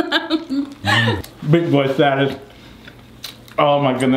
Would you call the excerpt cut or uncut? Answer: cut